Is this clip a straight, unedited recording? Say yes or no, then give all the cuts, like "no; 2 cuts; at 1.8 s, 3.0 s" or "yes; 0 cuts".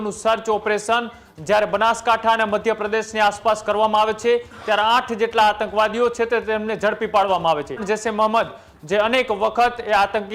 no; 1 cut; at 7.8 s